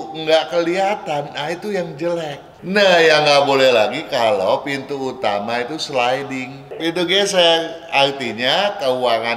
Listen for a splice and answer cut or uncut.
cut